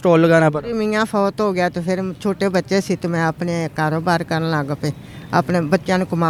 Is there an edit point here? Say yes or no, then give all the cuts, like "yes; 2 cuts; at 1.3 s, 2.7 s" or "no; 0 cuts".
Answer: no; 0 cuts